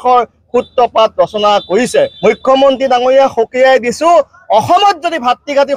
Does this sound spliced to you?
yes; 1 cut; at 2.1 s

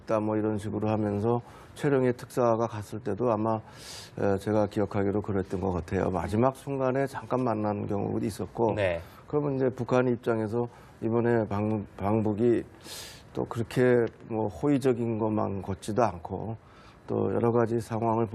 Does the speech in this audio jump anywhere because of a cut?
no; 0 cuts

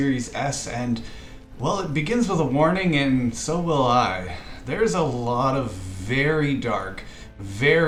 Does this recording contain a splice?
no; 0 cuts

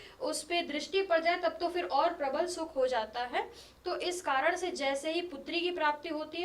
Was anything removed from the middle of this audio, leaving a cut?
no; 0 cuts

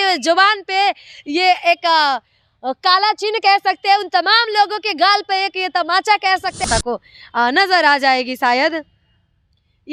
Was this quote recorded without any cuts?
no; 1 cut; at 6.6 s

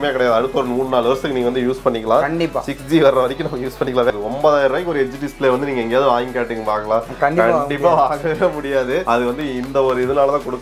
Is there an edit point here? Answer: yes; 2 cuts; at 4.1 s, 9.0 s

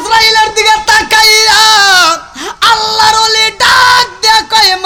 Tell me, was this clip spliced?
no; 0 cuts

